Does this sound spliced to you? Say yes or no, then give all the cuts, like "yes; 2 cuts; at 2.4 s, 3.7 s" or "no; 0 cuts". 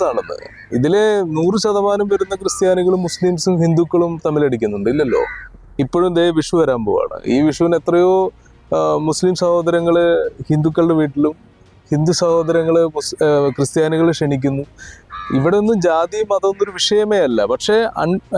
no; 0 cuts